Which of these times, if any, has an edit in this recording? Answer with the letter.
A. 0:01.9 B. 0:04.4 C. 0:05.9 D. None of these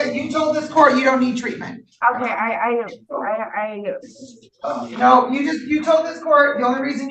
D